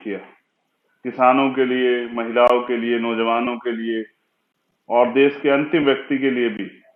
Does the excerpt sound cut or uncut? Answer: uncut